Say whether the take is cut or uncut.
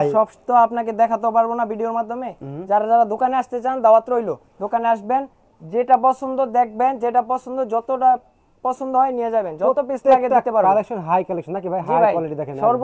uncut